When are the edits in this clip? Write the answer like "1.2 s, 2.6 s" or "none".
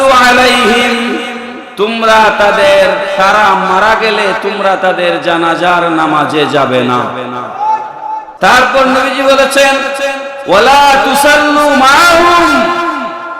8.3 s